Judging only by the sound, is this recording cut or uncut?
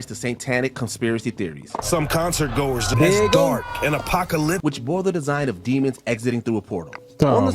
cut